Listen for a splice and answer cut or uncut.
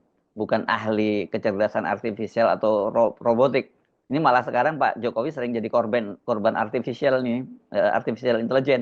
uncut